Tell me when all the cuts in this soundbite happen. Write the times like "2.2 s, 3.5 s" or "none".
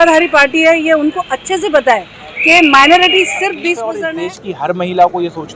3.9 s